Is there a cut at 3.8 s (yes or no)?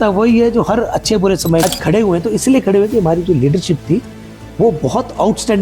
no